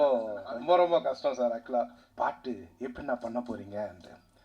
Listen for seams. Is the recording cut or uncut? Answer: cut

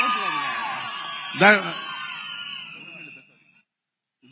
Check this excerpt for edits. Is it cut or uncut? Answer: uncut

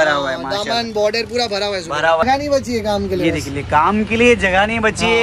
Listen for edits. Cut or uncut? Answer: cut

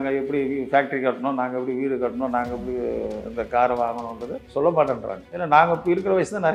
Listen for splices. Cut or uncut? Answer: uncut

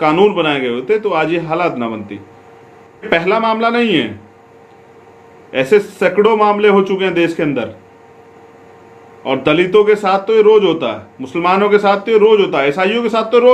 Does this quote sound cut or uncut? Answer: cut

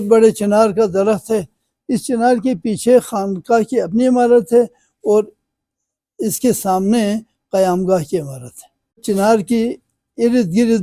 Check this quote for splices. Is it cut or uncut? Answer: uncut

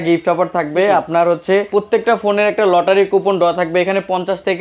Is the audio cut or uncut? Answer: cut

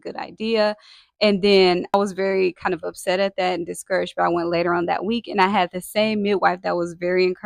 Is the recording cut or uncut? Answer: uncut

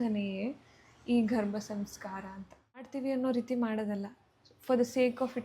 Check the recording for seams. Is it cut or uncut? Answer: cut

